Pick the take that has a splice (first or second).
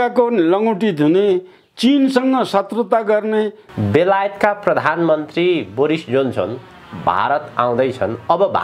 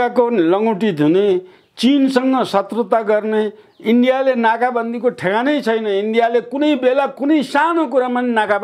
first